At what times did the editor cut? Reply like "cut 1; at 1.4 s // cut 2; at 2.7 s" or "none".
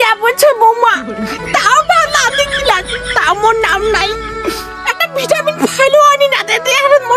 none